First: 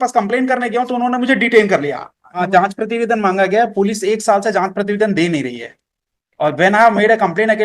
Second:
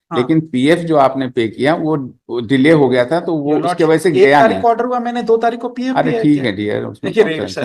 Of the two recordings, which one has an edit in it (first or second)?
first